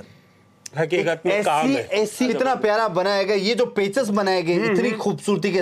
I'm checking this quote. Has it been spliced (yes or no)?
yes